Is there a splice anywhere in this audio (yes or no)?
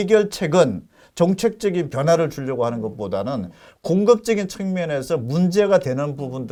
no